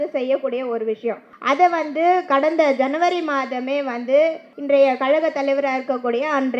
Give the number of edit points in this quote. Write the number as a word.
two